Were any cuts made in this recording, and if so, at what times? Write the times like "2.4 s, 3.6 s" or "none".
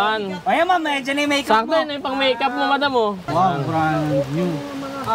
3.2 s

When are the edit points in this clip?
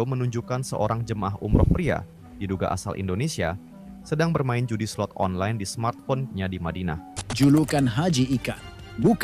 7.2 s

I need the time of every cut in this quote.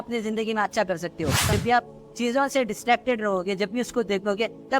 1.5 s

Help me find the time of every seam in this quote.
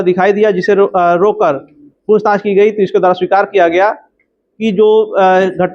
2.1 s

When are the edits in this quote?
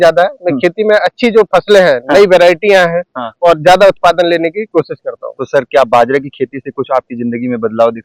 none

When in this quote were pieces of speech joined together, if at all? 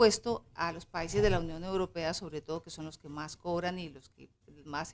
none

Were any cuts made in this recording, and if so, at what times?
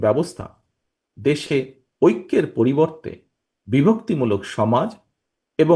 none

